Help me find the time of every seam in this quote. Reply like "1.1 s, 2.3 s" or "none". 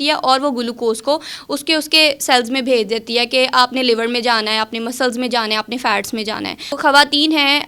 6.8 s